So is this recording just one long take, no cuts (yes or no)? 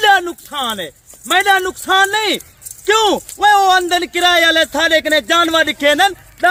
yes